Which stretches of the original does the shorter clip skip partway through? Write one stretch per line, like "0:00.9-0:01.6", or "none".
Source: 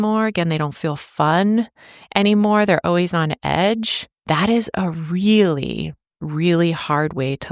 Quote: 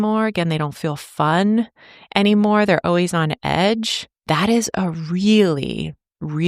none